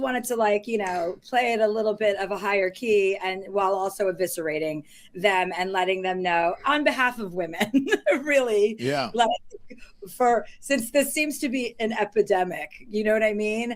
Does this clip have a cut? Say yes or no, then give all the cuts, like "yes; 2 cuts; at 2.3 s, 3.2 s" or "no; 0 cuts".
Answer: no; 0 cuts